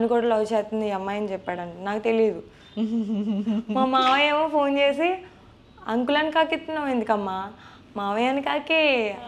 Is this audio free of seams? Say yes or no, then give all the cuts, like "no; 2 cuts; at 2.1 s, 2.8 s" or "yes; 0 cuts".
yes; 0 cuts